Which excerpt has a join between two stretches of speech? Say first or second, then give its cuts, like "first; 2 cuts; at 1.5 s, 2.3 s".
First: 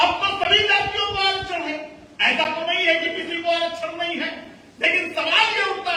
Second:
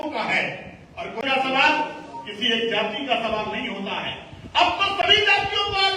second; 1 cut; at 1.2 s